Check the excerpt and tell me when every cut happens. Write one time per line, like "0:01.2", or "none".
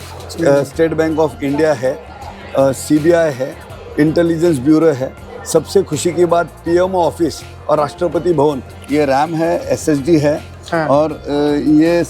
0:08.8

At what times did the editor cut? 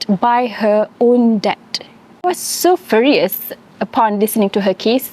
0:02.2

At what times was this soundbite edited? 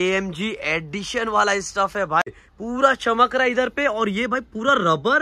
0:02.4

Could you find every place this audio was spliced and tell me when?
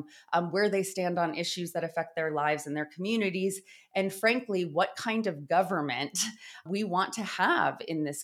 0:06.6

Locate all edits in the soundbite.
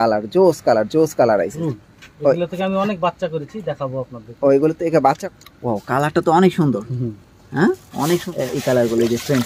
0:01.6
0:05.2
0:08.3

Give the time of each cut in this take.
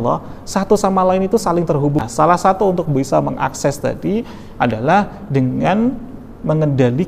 0:02.0

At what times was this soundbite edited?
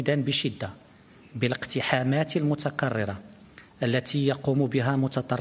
none

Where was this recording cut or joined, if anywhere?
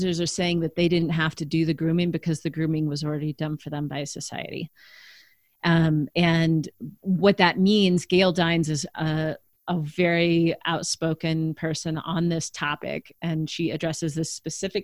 none

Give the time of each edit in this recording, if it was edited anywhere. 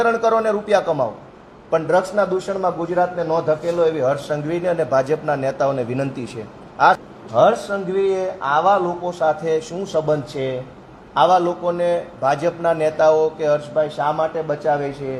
0:07.0

